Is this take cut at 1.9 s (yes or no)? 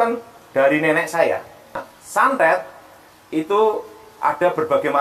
yes